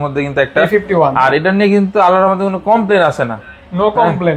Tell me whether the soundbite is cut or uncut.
uncut